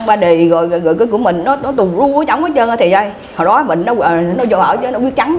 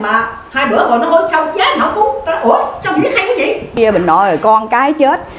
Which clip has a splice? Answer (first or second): second